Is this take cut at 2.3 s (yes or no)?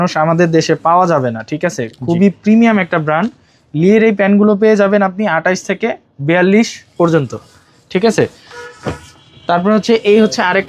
no